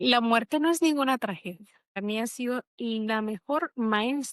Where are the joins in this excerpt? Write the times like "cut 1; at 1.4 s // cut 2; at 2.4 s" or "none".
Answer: cut 1; at 2.0 s